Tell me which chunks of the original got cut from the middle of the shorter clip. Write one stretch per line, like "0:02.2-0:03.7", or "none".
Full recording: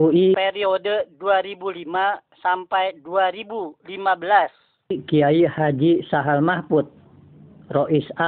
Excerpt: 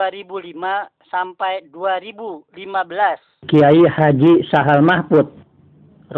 0:04.7-0:05.0